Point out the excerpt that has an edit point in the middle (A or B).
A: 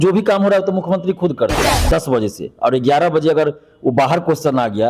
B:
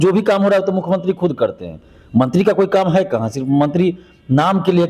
A